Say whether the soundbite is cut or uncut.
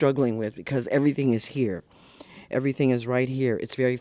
uncut